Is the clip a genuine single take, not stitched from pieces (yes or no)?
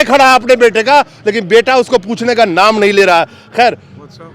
yes